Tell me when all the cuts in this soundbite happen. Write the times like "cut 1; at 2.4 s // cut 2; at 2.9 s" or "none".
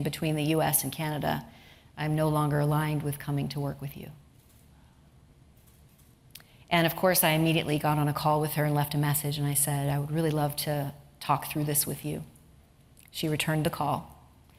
none